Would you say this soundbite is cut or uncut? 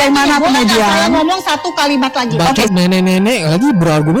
uncut